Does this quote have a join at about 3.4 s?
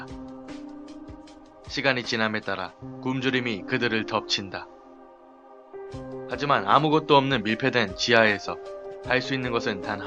yes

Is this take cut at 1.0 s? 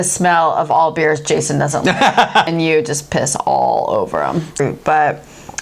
no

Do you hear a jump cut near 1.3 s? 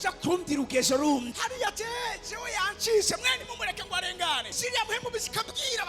yes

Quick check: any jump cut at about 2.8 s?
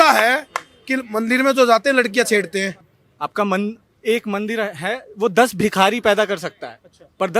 yes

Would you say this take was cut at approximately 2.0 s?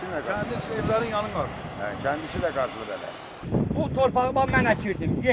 no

